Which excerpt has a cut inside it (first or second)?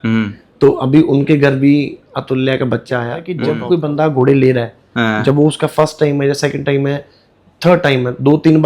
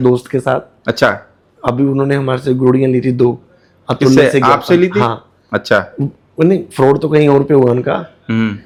first